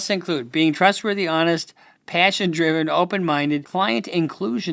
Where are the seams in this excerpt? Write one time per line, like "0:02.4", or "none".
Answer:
0:03.7